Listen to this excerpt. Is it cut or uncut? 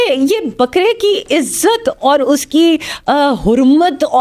uncut